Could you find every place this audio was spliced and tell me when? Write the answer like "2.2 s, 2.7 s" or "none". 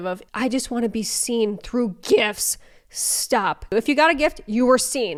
none